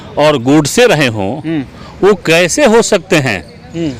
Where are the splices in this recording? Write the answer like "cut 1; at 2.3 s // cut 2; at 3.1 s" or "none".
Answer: none